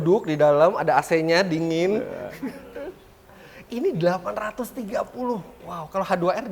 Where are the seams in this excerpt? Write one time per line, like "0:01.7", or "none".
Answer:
none